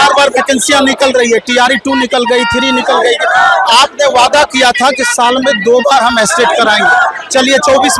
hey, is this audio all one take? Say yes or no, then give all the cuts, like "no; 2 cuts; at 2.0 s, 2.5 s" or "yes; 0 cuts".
yes; 0 cuts